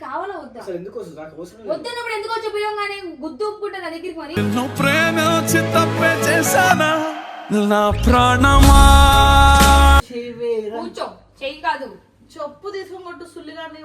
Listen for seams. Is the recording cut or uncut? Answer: cut